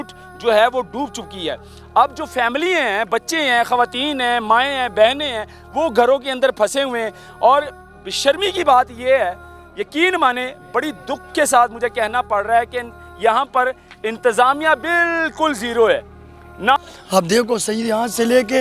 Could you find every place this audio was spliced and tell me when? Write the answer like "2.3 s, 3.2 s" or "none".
16.8 s

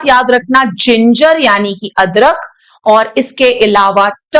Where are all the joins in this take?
none

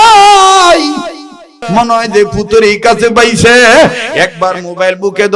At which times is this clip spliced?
1.5 s

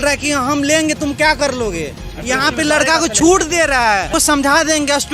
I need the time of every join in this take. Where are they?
4.1 s

